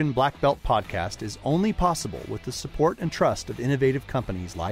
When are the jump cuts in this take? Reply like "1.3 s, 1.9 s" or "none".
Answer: none